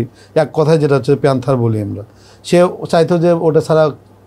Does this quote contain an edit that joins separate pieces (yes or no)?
no